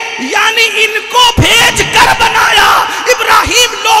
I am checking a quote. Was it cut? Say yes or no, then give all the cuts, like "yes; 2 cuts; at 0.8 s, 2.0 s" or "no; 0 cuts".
yes; 1 cut; at 1.3 s